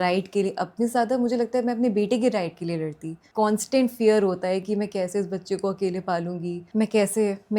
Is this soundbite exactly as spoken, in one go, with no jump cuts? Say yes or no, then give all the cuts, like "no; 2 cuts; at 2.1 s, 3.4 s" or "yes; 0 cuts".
no; 2 cuts; at 3.2 s, 6.6 s